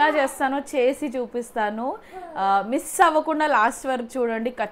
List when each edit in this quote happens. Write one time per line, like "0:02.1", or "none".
none